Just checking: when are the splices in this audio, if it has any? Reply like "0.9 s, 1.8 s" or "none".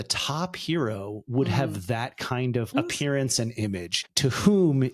2.7 s, 4.0 s